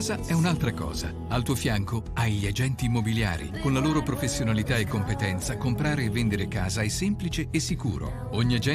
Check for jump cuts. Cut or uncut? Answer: cut